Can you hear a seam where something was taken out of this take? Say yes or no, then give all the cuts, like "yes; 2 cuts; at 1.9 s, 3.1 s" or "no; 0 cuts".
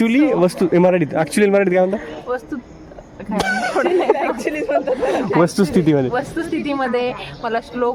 no; 0 cuts